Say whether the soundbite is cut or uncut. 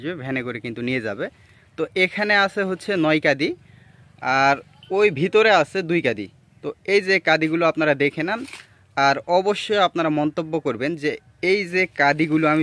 uncut